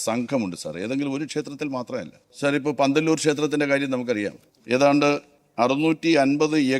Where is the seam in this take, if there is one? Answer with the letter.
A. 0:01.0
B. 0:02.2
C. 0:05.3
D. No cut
B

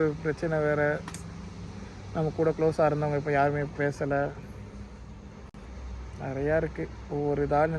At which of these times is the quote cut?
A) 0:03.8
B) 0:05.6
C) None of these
C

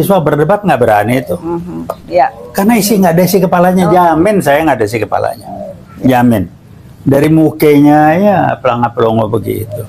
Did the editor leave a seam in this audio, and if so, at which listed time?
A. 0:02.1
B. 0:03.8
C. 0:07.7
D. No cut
D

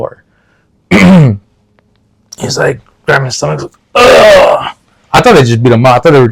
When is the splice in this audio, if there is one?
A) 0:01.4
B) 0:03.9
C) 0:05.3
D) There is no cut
D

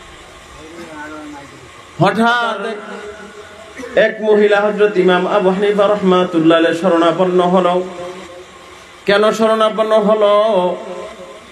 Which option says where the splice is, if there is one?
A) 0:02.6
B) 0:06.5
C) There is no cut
A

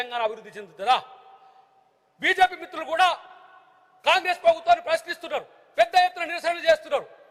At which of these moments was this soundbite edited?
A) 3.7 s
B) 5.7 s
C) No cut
C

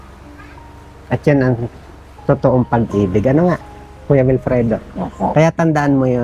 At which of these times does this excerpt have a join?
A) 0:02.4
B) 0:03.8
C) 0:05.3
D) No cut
D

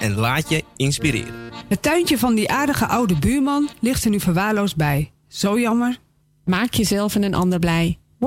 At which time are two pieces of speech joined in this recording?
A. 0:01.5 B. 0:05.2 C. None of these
A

